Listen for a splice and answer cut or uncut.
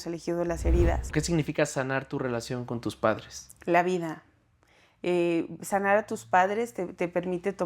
cut